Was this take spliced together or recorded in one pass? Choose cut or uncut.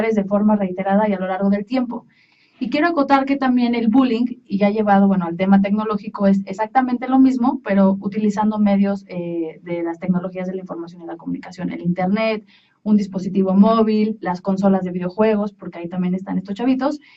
uncut